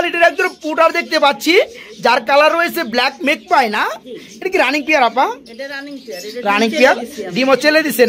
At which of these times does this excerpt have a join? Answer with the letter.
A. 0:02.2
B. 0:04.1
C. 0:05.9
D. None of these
D